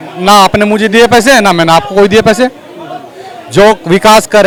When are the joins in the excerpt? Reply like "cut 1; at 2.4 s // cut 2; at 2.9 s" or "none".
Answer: none